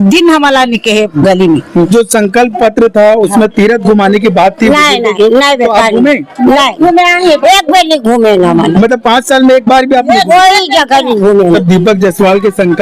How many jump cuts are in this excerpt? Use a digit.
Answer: 2